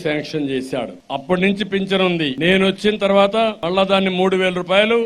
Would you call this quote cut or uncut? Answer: cut